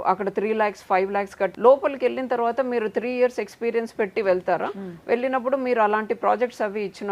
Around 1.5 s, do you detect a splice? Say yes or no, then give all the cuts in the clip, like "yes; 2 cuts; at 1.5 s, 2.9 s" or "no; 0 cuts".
yes; 1 cut; at 1.5 s